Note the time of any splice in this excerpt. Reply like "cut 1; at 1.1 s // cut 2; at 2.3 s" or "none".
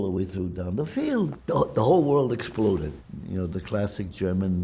cut 1; at 1.4 s // cut 2; at 2.9 s